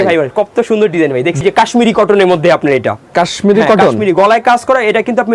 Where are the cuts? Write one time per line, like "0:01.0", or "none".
0:01.4